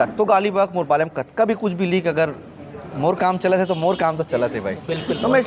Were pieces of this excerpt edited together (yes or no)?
no